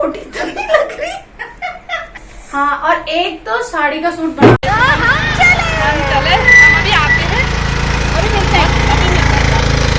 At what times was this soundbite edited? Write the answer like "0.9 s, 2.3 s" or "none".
4.6 s